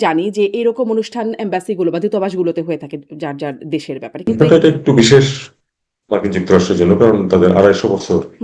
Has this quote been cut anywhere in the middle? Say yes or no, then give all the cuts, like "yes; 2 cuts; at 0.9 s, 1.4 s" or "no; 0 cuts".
yes; 1 cut; at 4.3 s